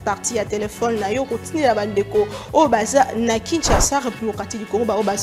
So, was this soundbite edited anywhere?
no; 0 cuts

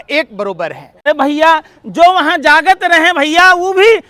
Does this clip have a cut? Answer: yes; 1 cut; at 1.1 s

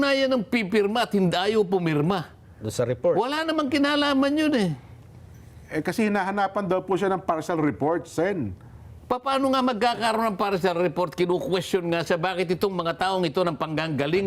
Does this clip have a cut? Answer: no; 0 cuts

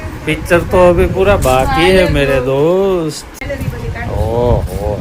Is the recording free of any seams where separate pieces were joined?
no; 1 cut; at 3.0 s

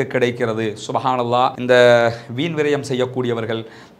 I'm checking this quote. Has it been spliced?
no; 0 cuts

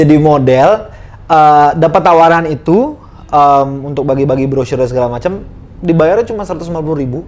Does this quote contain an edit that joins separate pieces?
no; 0 cuts

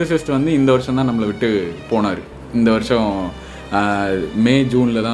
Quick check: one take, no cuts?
yes; 0 cuts

